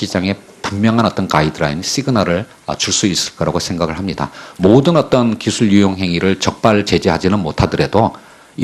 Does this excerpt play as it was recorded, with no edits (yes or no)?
no